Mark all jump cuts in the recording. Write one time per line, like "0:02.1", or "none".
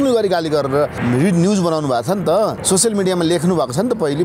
0:01.0
0:02.6